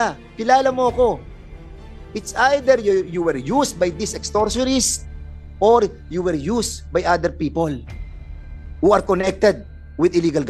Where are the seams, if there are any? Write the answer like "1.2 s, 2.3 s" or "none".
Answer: none